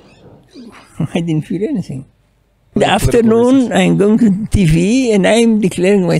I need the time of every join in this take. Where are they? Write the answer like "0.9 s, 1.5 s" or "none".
2.8 s